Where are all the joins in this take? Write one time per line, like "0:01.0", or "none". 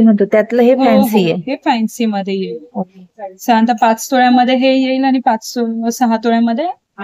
none